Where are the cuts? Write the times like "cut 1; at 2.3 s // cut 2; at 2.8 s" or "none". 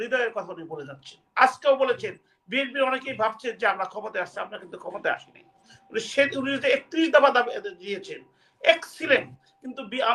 none